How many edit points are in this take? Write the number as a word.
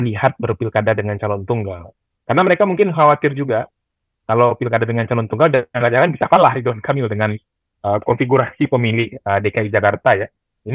zero